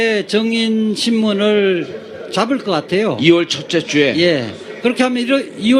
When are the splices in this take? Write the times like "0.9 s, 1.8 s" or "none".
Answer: 1.2 s